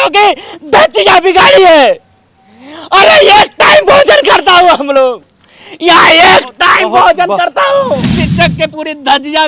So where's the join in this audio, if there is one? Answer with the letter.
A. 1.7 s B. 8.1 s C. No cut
B